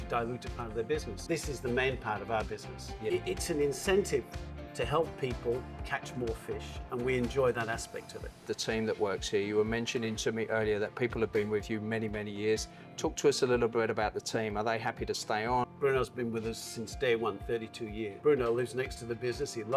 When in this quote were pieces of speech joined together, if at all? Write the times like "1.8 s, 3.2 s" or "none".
none